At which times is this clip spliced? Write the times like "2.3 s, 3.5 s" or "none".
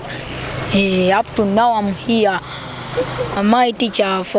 3.3 s